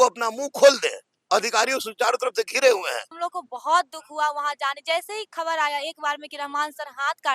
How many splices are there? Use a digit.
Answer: 1